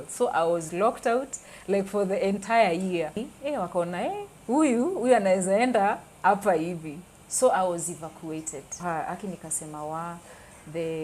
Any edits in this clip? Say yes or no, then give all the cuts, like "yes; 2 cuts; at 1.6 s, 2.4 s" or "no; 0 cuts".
yes; 2 cuts; at 3.2 s, 8.9 s